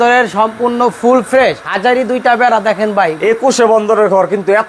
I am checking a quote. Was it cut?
yes; 2 cuts; at 1.7 s, 3.2 s

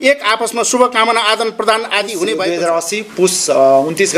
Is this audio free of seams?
no; 1 cut; at 2.5 s

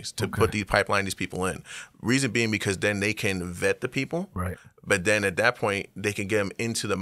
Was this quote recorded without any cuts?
yes; 0 cuts

